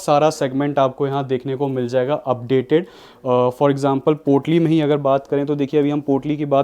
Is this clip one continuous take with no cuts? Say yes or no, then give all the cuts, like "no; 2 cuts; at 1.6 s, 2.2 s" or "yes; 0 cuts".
yes; 0 cuts